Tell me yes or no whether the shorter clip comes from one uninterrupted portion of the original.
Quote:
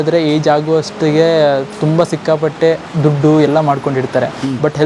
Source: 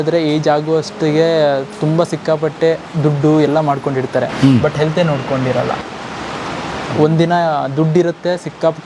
yes